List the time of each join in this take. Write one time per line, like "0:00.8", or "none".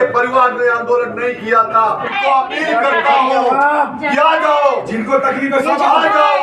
0:02.1